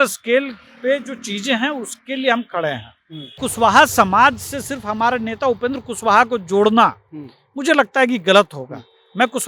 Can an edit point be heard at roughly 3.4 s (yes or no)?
yes